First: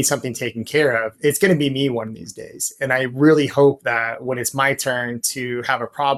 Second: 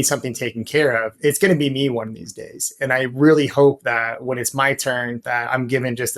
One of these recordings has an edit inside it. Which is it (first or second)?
second